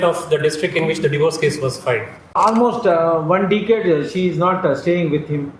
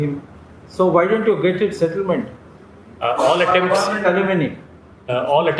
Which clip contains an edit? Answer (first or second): first